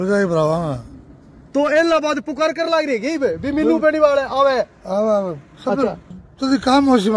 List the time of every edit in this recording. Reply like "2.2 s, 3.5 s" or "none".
6.2 s